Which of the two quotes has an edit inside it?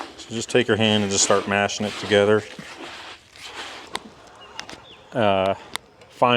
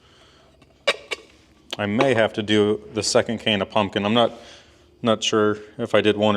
first; 1 cut; at 3.9 s

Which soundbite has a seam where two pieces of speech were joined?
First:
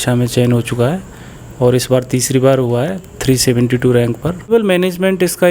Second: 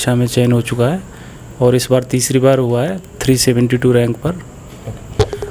first; 1 cut; at 4.5 s

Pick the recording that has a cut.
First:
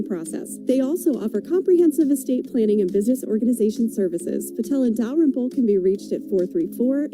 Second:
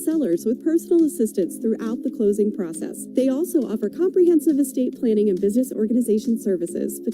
second; 1 cut; at 1.1 s

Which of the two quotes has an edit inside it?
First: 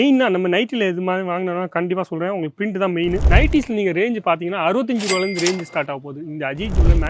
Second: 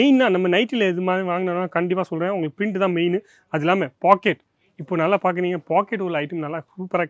first; 1 cut; at 3.2 s

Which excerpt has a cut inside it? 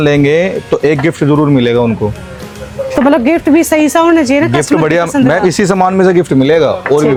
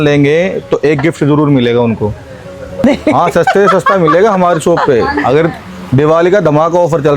second; 1 cut; at 2.8 s

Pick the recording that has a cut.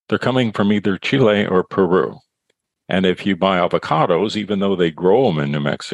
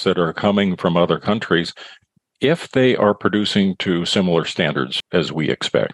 second; 1 cut; at 5.0 s

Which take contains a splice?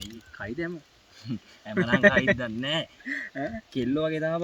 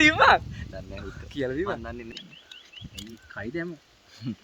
second; 1 cut; at 2.1 s

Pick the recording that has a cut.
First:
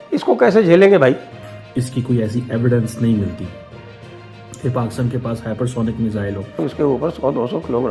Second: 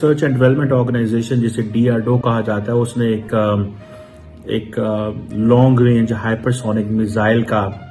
first; 2 cuts; at 1.5 s, 6.6 s

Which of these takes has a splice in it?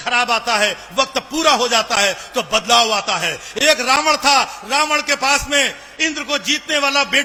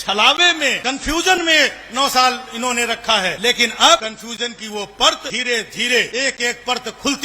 second; 5 cuts; at 0.8 s, 3.4 s, 4.0 s, 5.3 s, 6.1 s

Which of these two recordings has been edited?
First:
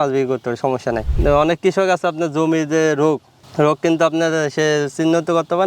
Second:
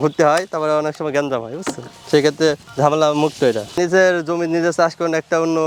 first; 1 cut; at 1.1 s

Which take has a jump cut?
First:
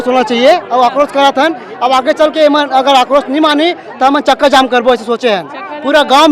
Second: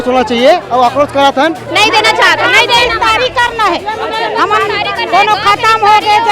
second; 1 cut; at 1.6 s

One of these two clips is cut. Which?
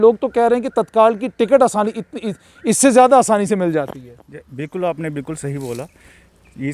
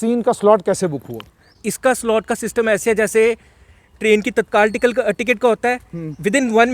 second; 1 cut; at 1.6 s

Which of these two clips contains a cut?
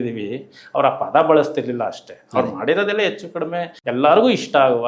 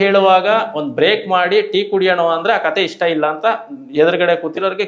first; 1 cut; at 3.8 s

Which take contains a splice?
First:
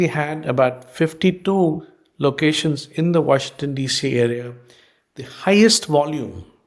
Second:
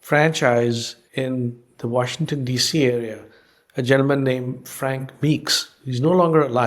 second; 1 cut; at 1.0 s

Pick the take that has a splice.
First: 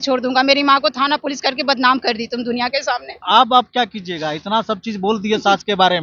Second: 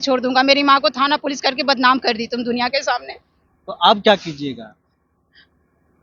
first; 1 cut; at 3.2 s

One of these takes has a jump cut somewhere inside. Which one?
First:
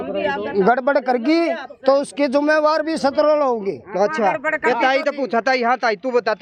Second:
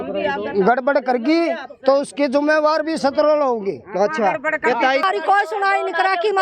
second; 1 cut; at 5.0 s

